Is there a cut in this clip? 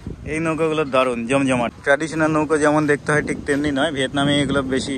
yes; 1 cut; at 1.8 s

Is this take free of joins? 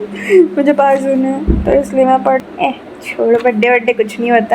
no; 1 cut; at 2.5 s

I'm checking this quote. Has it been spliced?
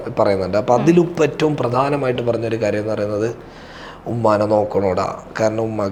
no; 0 cuts

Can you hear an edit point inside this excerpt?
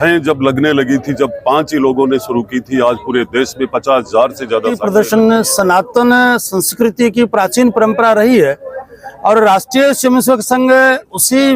yes; 1 cut; at 4.8 s

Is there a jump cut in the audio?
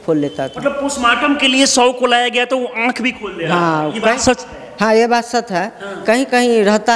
no; 0 cuts

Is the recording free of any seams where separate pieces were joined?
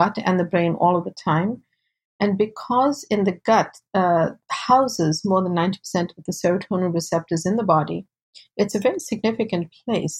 yes; 0 cuts

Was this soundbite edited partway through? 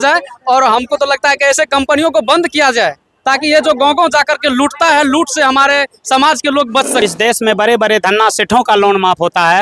yes; 1 cut; at 7.0 s

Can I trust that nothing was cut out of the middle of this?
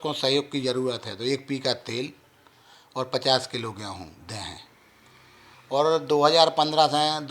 yes; 0 cuts

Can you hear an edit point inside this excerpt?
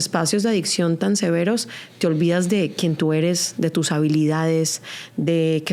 no; 0 cuts

